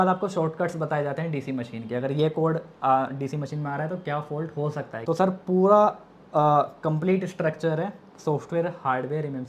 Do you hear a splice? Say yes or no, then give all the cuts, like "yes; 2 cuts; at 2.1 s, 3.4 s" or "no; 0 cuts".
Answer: yes; 1 cut; at 5.0 s